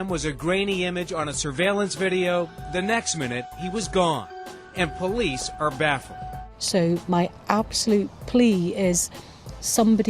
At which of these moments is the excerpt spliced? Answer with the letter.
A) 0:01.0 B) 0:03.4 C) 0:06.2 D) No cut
C